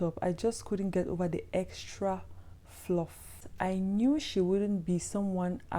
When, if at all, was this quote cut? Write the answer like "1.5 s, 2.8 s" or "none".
3.4 s